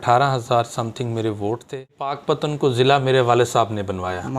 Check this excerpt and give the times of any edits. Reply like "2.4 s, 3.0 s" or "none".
2.2 s